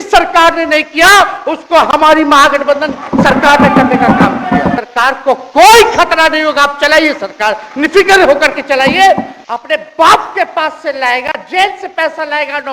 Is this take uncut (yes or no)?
no